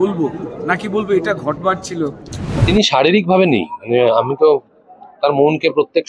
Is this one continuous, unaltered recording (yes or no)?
no